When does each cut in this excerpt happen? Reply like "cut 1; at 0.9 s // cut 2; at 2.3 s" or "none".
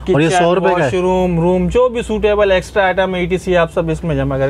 none